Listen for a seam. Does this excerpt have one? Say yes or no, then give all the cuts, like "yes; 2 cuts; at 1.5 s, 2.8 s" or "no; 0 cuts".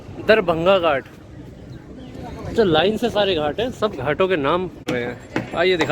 yes; 1 cut; at 4.9 s